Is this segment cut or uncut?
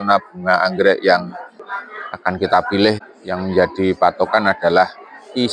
cut